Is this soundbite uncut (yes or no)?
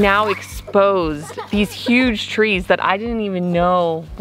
yes